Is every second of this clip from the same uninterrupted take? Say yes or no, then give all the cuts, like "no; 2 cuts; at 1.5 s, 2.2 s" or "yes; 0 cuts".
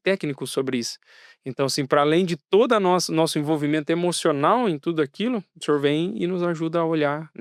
yes; 0 cuts